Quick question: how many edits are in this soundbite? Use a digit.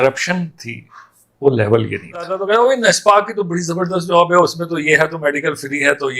1